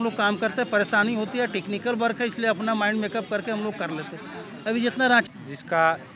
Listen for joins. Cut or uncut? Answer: cut